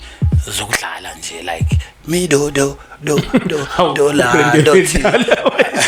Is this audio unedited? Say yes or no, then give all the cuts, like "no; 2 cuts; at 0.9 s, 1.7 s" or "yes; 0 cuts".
yes; 0 cuts